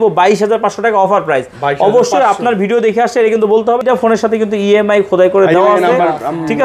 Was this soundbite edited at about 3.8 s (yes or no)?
yes